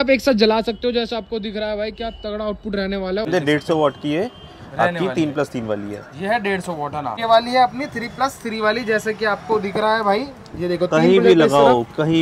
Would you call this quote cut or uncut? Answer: cut